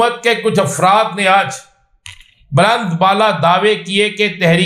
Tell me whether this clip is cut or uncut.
uncut